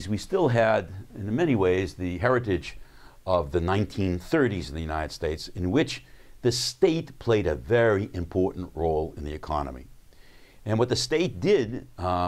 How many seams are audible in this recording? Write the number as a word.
one